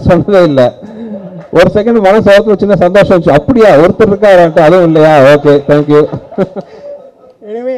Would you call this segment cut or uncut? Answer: uncut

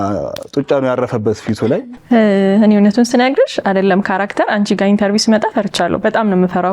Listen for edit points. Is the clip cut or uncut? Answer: cut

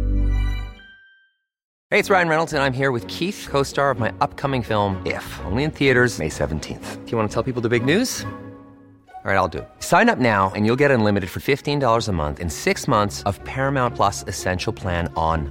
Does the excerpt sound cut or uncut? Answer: cut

